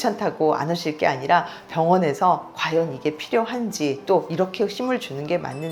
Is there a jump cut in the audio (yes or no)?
no